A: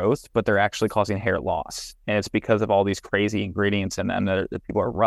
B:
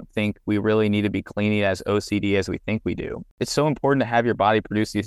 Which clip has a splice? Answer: B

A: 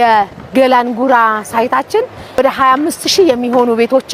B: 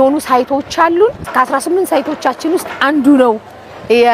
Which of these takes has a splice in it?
A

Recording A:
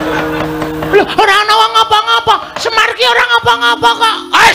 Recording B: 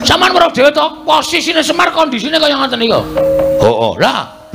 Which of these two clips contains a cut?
B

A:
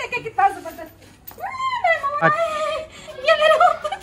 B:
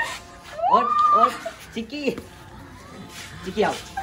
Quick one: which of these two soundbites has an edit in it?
A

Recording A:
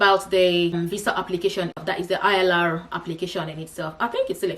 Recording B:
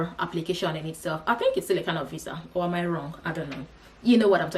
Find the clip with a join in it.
A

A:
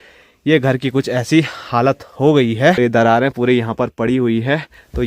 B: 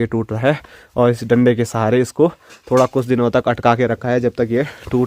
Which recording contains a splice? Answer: A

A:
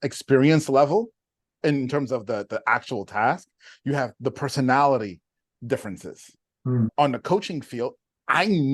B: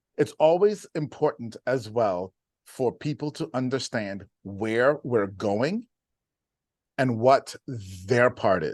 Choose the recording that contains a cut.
A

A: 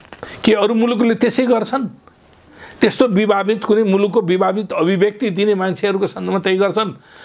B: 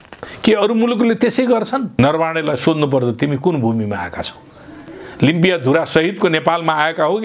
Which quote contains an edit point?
B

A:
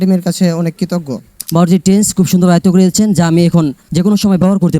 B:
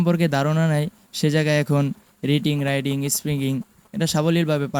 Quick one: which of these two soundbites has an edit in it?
A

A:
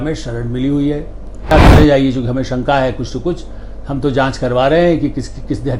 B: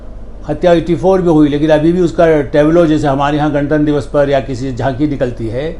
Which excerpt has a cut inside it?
A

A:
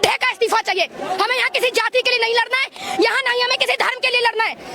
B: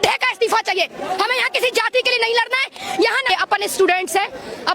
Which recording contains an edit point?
B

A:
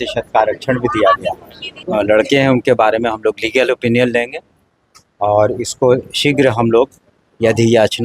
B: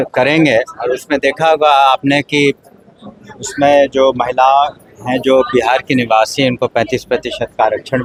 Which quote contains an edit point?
A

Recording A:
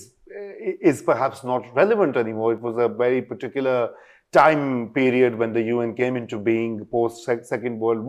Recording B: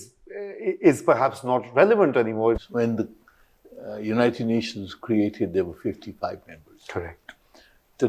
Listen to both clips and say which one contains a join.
B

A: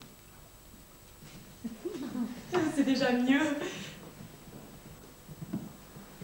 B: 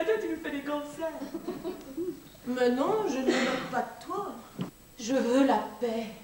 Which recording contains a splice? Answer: B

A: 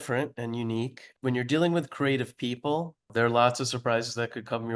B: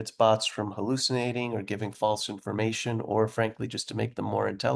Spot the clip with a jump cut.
A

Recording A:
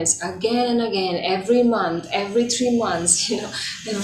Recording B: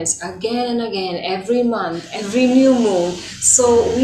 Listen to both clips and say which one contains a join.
B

